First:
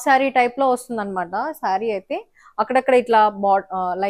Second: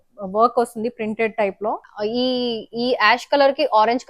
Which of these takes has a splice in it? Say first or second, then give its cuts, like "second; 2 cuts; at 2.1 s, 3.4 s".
second; 1 cut; at 1.9 s